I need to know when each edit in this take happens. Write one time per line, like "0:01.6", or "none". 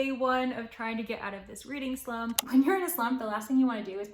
0:02.4